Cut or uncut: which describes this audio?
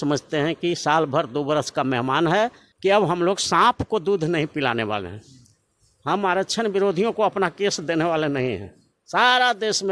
cut